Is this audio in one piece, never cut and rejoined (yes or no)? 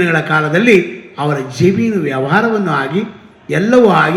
yes